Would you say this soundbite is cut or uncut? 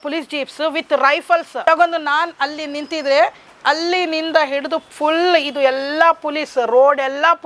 cut